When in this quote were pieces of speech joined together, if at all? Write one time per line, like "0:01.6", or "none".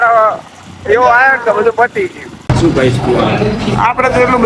0:02.4